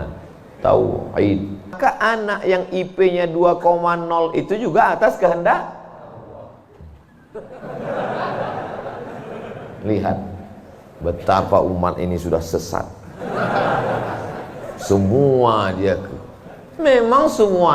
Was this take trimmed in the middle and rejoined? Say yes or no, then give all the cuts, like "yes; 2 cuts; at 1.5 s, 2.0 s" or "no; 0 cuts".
yes; 1 cut; at 1.7 s